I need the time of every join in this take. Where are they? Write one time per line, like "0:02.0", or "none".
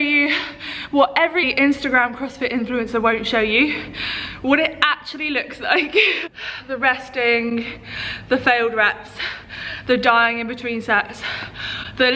none